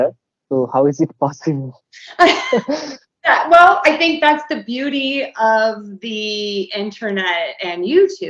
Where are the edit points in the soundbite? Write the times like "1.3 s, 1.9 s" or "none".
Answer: none